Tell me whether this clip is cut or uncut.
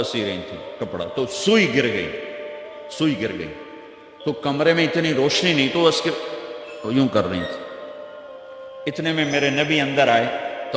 uncut